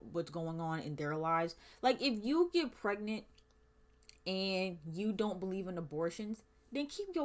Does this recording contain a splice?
no; 0 cuts

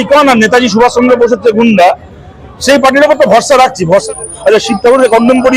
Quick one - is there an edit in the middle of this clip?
yes; 1 cut; at 4.0 s

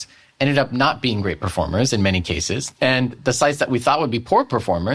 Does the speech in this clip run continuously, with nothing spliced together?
no; 1 cut; at 2.6 s

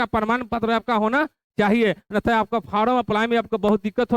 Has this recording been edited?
no; 0 cuts

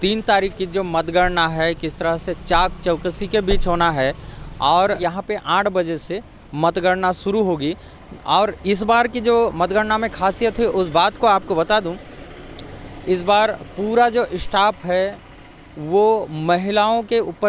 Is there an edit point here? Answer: yes; 1 cut; at 5.0 s

